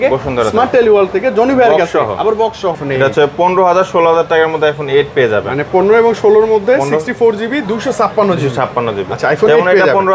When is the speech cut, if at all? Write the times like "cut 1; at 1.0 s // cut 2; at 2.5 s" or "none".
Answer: none